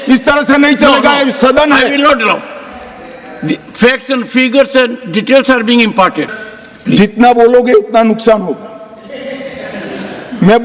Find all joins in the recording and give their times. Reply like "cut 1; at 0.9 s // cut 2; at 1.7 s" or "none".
cut 1; at 6.3 s